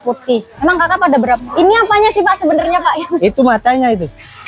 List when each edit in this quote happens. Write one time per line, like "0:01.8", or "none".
0:01.4